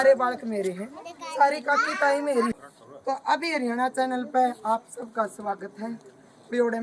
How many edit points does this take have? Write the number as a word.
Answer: one